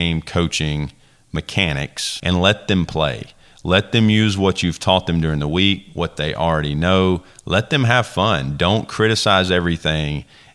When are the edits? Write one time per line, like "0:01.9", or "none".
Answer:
0:02.1